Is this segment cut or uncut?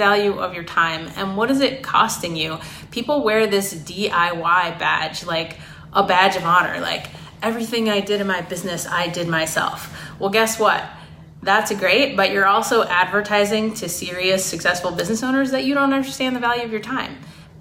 uncut